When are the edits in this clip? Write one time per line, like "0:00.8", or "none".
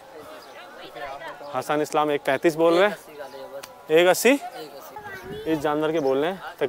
0:05.1